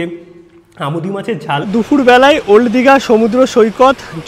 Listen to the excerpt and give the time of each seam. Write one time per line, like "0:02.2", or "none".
0:01.7